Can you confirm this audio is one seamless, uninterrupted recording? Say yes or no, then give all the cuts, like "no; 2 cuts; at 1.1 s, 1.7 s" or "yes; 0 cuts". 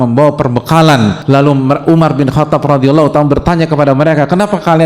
no; 1 cut; at 1.2 s